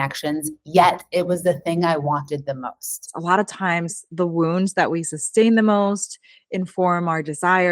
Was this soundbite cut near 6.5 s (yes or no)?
no